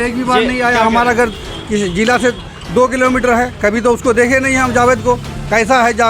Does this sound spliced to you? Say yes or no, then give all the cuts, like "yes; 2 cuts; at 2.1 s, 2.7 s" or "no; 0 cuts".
no; 0 cuts